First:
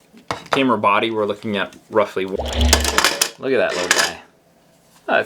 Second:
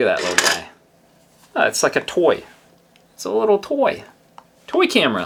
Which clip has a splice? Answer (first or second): first